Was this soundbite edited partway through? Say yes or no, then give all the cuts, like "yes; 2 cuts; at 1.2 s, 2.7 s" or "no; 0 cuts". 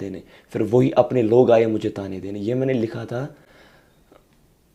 no; 0 cuts